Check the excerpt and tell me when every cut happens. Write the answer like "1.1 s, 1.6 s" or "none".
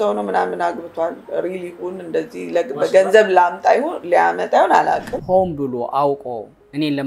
5.1 s